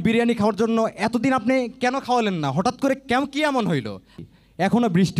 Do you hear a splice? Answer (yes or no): yes